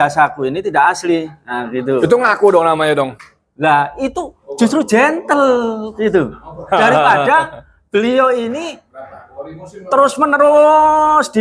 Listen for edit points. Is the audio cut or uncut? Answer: uncut